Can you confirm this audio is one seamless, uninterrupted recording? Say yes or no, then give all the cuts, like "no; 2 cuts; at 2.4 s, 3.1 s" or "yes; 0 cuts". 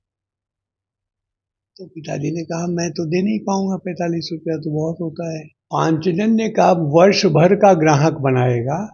no; 1 cut; at 5.5 s